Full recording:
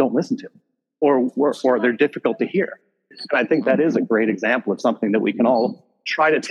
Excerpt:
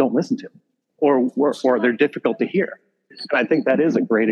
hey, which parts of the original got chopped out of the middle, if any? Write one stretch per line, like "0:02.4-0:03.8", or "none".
none